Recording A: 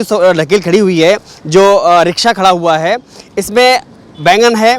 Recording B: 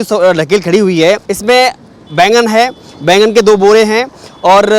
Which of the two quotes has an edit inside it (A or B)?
B